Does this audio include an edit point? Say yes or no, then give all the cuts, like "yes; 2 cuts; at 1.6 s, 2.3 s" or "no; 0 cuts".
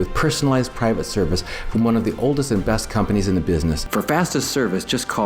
yes; 1 cut; at 3.8 s